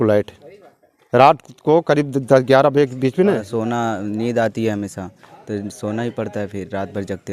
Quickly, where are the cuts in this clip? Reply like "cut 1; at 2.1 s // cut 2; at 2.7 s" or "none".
cut 1; at 3.4 s